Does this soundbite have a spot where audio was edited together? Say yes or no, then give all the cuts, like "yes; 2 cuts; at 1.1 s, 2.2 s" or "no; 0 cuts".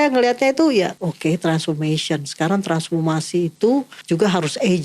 yes; 2 cuts; at 0.9 s, 4.0 s